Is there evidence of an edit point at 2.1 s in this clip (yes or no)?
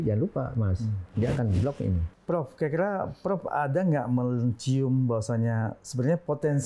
yes